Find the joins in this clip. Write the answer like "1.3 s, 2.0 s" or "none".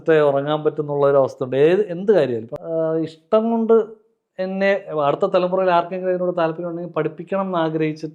2.5 s